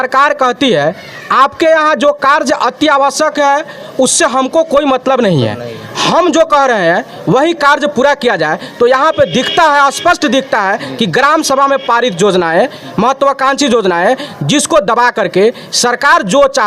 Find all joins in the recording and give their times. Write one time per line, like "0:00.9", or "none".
none